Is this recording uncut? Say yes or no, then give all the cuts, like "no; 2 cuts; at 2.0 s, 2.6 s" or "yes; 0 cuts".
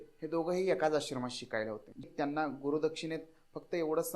no; 1 cut; at 2.0 s